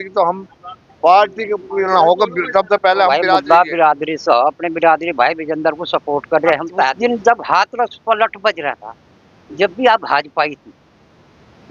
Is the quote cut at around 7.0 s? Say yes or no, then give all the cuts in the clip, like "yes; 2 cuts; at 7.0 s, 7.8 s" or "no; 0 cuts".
yes; 2 cuts; at 3.3 s, 7.0 s